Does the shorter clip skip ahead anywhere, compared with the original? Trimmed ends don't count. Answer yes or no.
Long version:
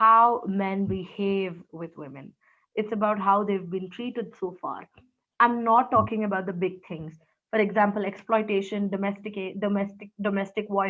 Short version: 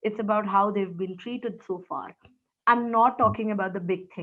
no